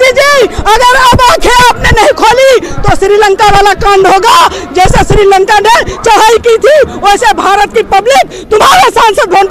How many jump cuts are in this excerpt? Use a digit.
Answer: 0